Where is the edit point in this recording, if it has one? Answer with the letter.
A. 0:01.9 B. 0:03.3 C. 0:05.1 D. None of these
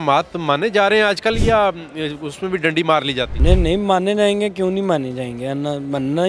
B